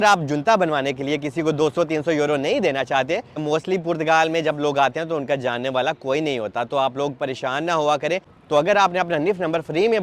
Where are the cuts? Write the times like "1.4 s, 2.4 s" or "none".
3.4 s, 8.3 s